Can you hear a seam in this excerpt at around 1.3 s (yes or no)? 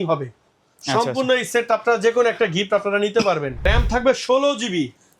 no